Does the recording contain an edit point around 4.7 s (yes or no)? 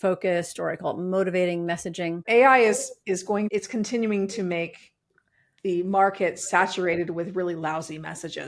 no